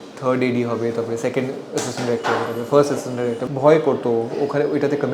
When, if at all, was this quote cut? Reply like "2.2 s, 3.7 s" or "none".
3.4 s